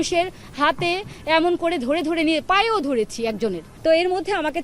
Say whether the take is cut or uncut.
cut